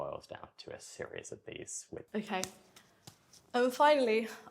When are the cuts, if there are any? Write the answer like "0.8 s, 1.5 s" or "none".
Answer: 2.0 s